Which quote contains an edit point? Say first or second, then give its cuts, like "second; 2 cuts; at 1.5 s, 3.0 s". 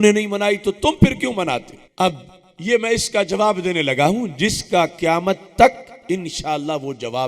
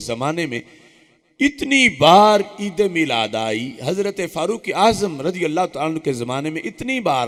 first; 1 cut; at 1.8 s